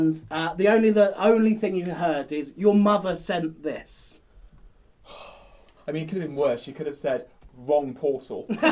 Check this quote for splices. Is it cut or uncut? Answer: uncut